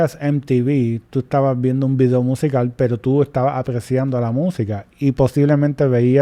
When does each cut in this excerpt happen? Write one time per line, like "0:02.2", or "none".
none

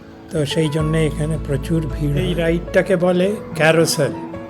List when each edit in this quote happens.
0:02.3

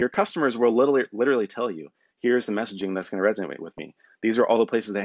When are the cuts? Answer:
0:02.0

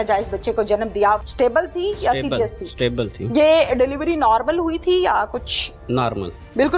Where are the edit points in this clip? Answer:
0:01.2

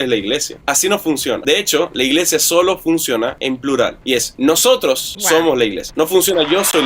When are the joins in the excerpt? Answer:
none

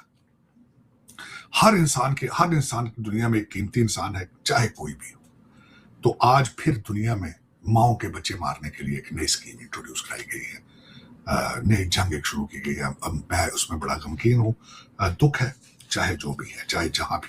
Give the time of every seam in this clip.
none

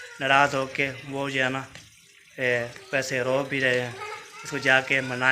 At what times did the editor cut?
none

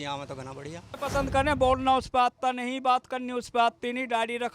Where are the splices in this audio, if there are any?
0:00.9

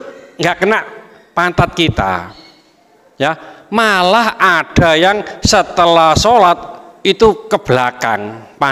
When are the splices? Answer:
none

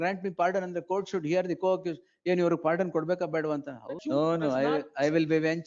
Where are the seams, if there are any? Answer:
0:04.0

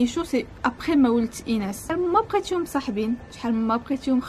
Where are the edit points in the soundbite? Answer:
0:01.8

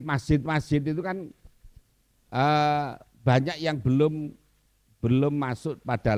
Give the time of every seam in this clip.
none

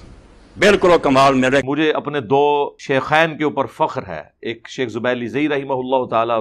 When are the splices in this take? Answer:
0:01.7
0:02.8

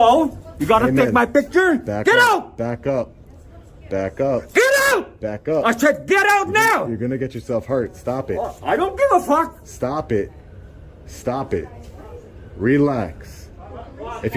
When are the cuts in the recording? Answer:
none

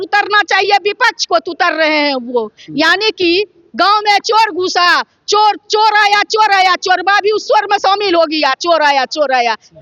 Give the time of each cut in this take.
none

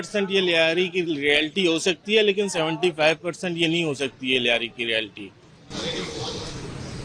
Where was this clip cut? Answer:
none

